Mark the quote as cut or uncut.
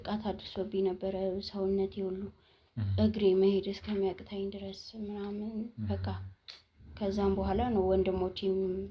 uncut